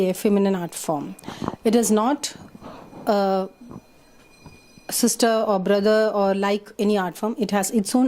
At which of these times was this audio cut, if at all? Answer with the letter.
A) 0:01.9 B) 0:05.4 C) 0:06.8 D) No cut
B